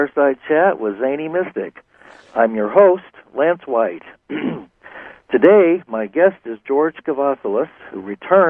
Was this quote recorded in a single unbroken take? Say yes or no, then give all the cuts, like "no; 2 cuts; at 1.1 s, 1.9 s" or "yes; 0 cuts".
yes; 0 cuts